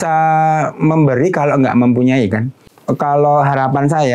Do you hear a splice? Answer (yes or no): yes